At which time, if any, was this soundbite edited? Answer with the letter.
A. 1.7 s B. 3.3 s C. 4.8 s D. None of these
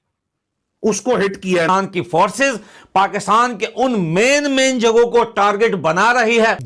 A